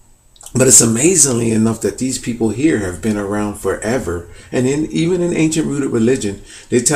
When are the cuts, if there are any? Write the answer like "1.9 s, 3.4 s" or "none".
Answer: 5.3 s